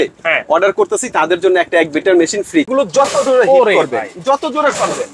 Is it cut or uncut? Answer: cut